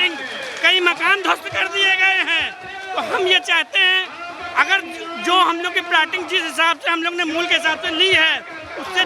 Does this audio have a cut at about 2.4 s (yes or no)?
no